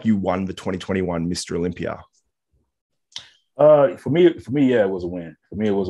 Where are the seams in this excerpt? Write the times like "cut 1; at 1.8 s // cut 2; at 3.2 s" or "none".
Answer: none